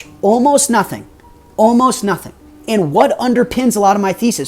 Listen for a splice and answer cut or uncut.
uncut